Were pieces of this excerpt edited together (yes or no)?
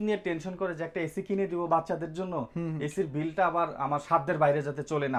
no